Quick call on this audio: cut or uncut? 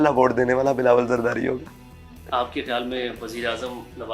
uncut